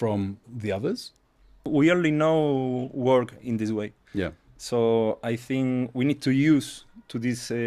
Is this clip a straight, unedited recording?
no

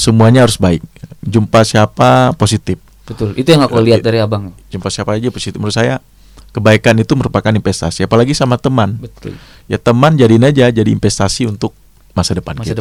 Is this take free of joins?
yes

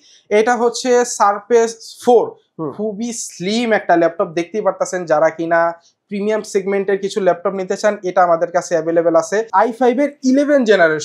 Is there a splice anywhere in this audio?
yes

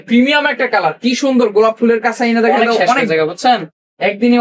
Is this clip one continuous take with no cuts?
no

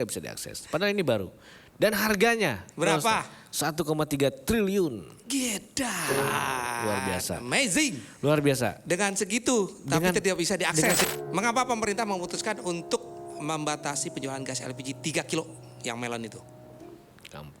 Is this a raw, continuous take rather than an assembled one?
no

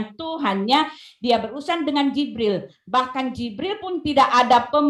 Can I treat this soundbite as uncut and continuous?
yes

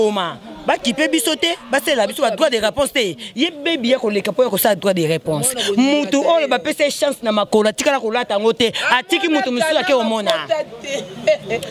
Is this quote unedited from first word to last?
yes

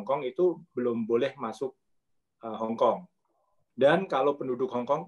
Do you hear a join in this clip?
no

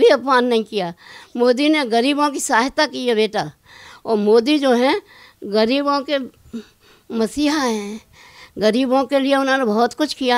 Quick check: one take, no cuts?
yes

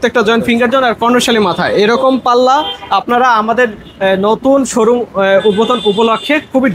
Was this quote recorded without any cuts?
yes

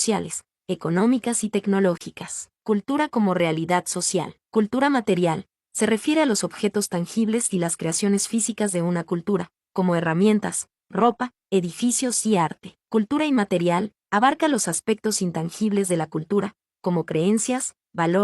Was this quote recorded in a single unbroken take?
no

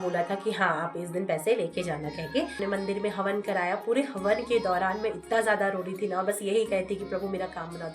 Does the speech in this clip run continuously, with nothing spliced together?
no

